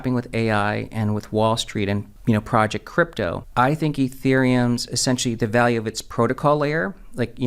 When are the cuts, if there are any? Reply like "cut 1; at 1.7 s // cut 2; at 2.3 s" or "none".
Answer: cut 1; at 2.1 s // cut 2; at 3.4 s